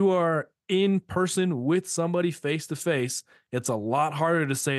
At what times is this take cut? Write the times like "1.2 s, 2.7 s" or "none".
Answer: none